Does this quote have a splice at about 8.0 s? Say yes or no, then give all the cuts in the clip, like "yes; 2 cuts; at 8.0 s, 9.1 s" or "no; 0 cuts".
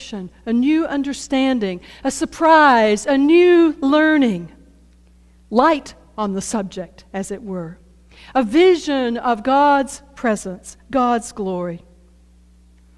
no; 0 cuts